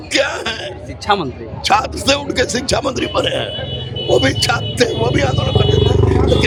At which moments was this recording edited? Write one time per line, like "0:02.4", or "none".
none